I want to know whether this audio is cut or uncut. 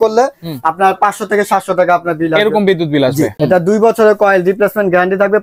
cut